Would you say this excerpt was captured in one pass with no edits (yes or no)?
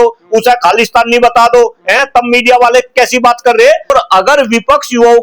no